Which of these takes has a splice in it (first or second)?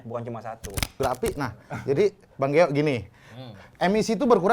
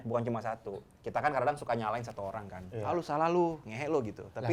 first